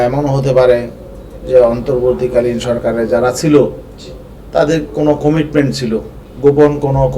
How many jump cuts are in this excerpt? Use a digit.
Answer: 1